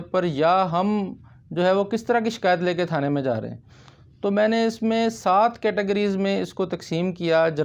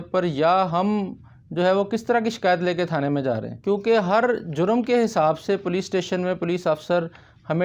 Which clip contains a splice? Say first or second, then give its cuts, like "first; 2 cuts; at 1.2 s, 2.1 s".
second; 1 cut; at 3.5 s